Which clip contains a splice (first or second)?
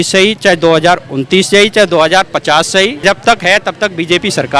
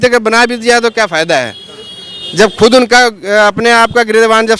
first